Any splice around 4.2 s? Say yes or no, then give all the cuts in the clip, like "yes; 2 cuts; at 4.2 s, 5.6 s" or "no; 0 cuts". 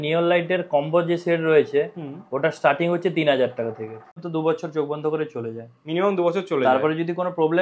yes; 1 cut; at 4.2 s